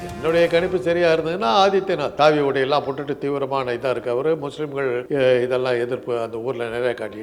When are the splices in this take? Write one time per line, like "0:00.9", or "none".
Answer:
0:02.1
0:05.0